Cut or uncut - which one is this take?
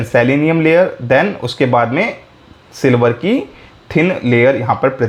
uncut